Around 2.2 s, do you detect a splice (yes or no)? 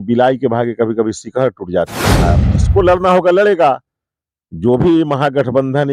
yes